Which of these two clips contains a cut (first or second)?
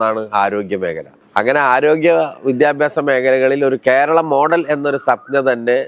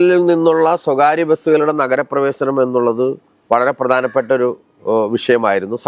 first